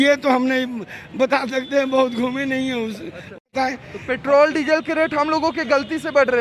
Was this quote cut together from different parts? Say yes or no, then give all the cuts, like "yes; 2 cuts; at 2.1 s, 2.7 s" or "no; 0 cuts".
yes; 1 cut; at 3.4 s